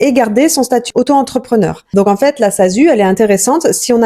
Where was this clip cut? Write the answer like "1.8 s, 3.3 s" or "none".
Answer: 1.8 s

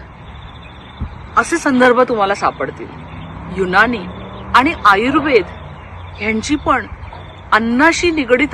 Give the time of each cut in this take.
none

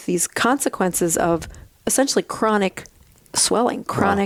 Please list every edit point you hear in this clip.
none

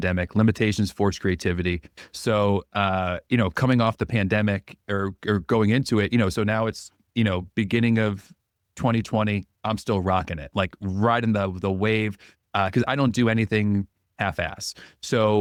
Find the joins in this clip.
none

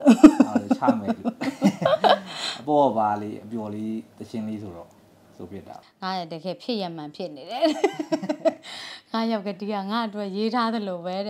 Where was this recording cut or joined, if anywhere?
5.7 s

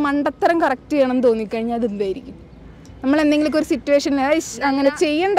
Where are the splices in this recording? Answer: none

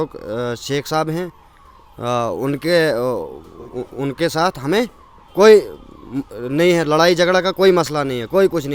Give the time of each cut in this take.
none

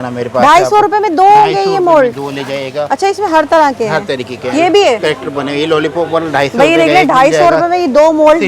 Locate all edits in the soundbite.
none

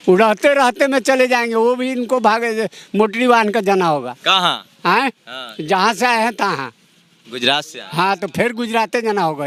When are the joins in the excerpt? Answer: none

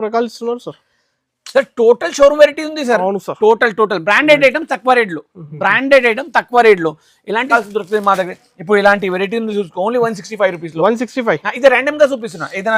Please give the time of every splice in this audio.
7.5 s

